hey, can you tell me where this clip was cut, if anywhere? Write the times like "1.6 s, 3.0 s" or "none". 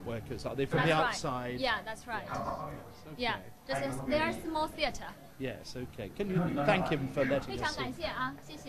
3.2 s

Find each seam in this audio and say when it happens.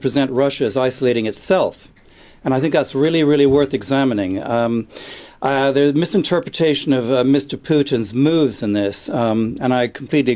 none

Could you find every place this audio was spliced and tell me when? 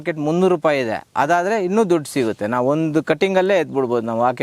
none

